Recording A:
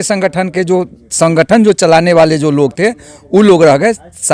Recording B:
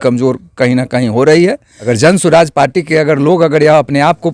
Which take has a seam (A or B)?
B